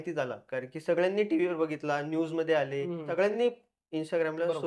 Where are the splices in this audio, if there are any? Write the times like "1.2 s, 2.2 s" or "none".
none